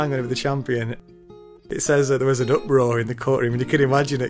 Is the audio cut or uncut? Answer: cut